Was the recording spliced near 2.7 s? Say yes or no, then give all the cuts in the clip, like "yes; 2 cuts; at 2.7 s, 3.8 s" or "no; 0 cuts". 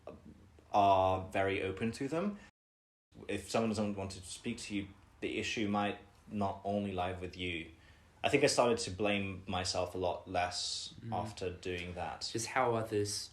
yes; 1 cut; at 2.7 s